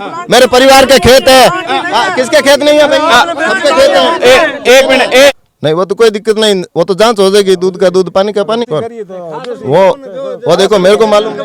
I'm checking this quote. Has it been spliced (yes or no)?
yes